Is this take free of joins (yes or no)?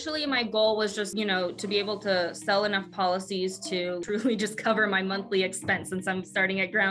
no